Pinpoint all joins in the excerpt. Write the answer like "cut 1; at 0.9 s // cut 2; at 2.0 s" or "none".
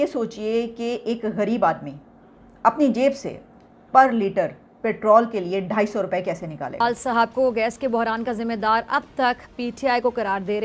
cut 1; at 6.8 s